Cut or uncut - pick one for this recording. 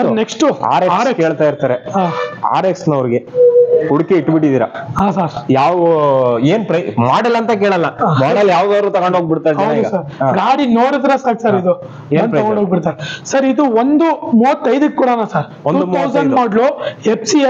uncut